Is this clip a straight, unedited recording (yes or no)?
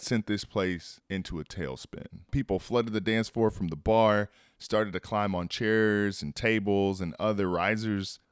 no